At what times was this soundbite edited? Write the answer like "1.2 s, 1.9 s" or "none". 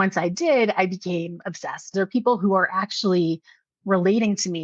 1.9 s